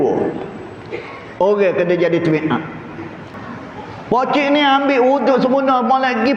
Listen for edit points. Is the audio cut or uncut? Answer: cut